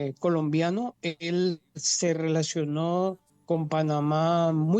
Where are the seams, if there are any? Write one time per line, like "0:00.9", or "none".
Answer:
0:03.3